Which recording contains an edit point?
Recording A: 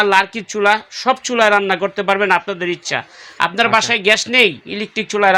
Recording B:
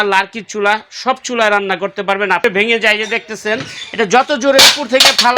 B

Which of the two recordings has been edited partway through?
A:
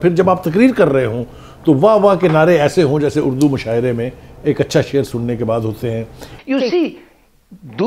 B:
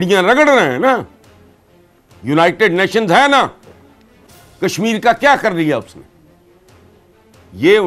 A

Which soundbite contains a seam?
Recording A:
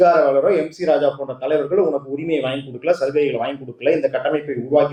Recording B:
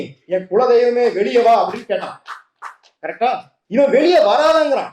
B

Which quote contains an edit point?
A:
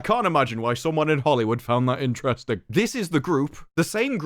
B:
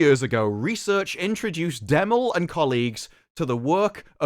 A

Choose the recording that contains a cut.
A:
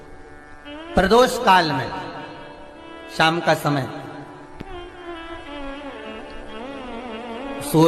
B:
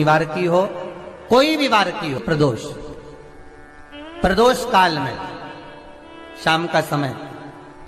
B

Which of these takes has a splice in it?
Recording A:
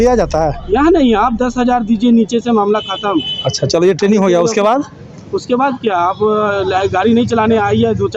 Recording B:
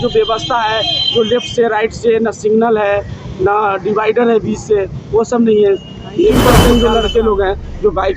B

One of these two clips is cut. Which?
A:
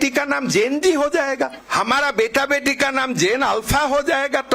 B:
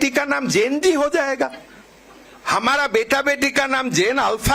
A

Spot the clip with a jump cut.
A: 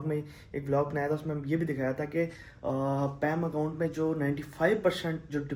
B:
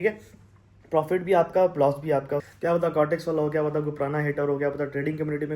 B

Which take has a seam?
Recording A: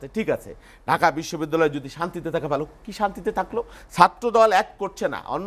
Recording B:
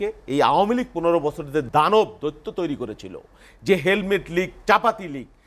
B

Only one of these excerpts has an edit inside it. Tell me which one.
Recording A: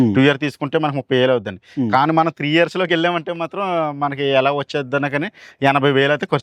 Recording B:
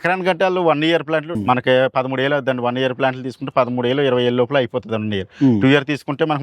B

